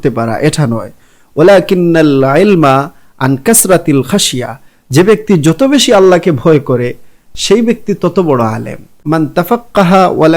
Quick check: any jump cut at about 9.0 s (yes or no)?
yes